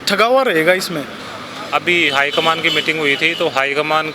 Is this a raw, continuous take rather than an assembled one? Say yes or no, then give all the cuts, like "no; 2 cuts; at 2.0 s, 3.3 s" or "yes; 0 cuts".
yes; 0 cuts